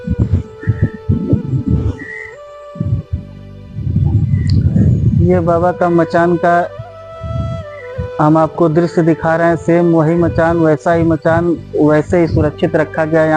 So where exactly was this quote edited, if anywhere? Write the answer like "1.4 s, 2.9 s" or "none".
none